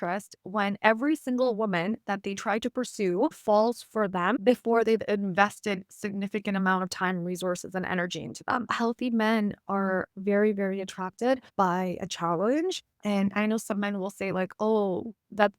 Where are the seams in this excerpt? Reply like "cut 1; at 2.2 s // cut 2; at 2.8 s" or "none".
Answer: cut 1; at 8.7 s // cut 2; at 11.5 s // cut 3; at 12.9 s